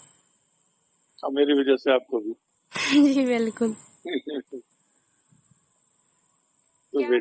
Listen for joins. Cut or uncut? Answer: uncut